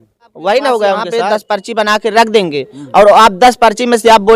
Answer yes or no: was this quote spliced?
yes